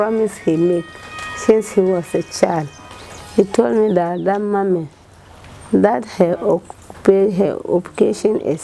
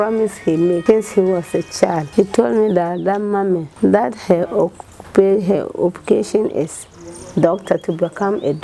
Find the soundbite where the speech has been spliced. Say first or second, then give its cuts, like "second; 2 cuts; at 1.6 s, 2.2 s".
second; 3 cuts; at 0.8 s, 2.0 s, 3.7 s